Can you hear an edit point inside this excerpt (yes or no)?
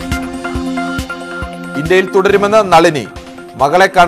yes